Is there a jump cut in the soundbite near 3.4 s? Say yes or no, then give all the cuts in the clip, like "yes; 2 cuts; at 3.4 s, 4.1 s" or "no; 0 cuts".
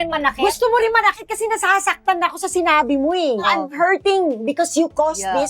yes; 1 cut; at 3.4 s